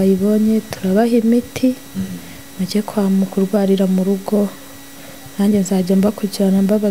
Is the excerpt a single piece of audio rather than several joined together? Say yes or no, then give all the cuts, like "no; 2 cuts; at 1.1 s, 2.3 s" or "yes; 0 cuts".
yes; 0 cuts